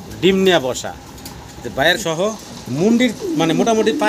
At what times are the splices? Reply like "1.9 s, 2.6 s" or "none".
2.0 s